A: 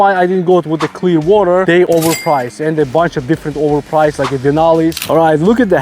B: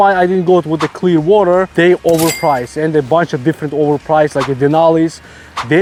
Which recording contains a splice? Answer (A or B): A